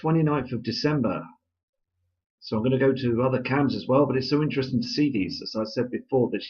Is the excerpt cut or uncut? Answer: cut